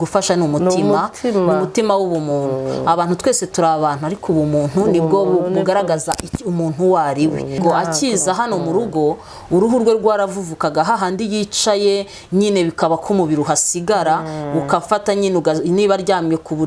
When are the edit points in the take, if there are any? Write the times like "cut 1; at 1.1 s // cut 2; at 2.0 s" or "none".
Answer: cut 1; at 7.6 s